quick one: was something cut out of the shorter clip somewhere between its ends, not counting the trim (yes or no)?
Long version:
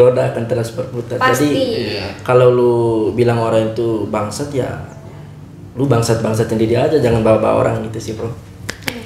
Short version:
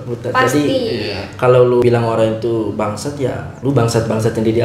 yes